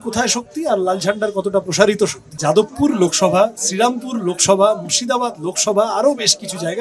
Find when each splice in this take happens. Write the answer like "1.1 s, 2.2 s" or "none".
2.3 s